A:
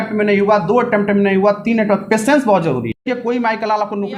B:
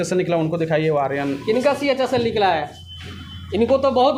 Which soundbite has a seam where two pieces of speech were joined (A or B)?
A